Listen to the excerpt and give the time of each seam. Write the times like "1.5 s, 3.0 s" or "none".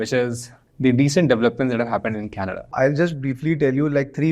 2.7 s

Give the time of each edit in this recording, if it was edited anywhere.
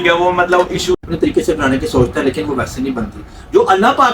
1.0 s

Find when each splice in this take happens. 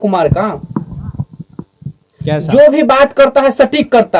none

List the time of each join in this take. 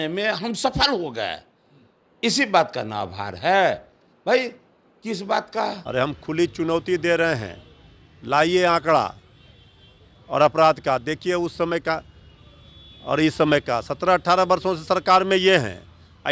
5.8 s

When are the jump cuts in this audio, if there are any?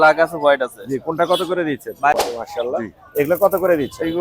2.2 s

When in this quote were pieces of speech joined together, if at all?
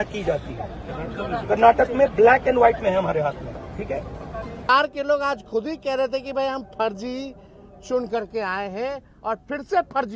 4.6 s

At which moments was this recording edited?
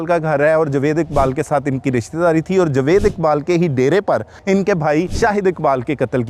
4.3 s, 5.1 s

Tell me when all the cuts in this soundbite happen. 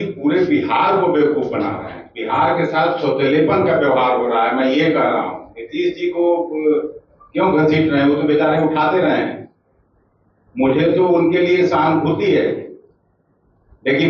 none

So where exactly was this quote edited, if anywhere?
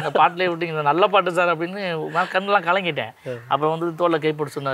none

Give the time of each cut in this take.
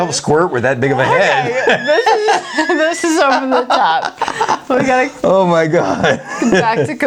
none

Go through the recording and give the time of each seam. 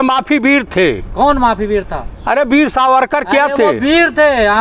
none

